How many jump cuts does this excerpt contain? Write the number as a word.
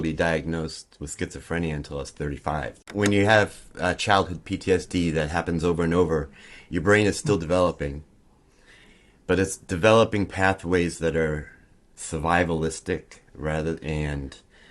one